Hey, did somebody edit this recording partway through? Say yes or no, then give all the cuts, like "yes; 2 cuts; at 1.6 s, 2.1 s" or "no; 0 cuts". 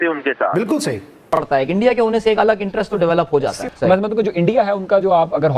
yes; 1 cut; at 1.3 s